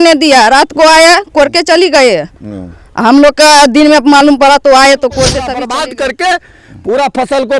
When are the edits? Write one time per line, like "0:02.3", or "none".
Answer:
0:05.5